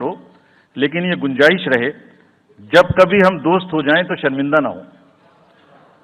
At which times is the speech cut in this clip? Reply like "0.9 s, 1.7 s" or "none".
none